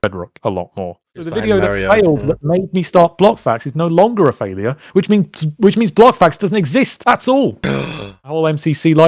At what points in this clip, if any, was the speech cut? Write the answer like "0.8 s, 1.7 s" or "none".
1.3 s, 8.3 s